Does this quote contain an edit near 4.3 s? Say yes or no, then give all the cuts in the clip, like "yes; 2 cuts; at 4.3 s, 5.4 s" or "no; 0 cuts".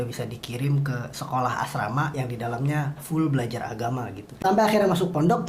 yes; 1 cut; at 4.3 s